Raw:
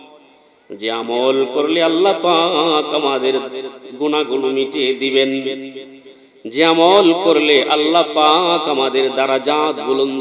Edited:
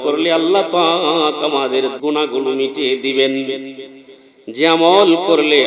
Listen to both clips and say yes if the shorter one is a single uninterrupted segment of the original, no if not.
no